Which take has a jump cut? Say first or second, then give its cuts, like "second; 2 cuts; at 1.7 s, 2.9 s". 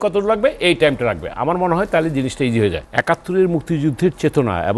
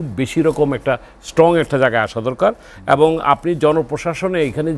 first; 1 cut; at 2.8 s